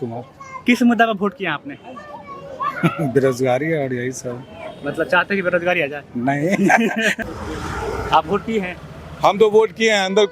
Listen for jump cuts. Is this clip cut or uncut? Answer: cut